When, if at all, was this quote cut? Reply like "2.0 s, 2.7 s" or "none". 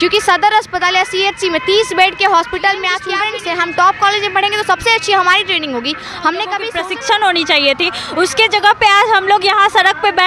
3.2 s, 6.7 s